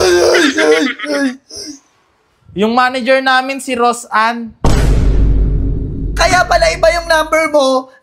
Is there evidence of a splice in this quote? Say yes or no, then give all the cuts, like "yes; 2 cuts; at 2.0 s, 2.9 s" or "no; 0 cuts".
no; 0 cuts